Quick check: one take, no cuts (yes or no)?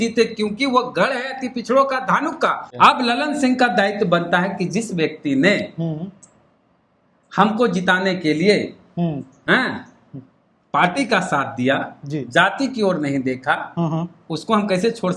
no